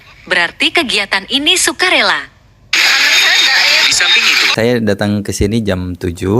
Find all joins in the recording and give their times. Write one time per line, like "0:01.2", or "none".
0:02.4
0:04.4

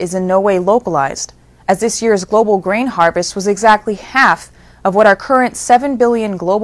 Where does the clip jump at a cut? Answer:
0:04.3

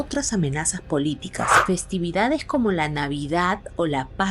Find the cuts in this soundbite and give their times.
0:01.5

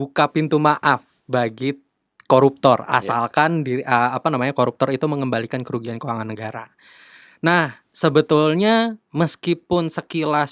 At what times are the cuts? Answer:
none

